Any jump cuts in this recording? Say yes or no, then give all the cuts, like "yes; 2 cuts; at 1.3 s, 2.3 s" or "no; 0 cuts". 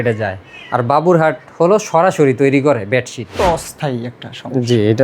yes; 1 cut; at 3.4 s